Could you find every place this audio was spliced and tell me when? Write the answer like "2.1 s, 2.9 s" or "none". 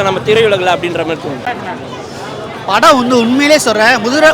1.4 s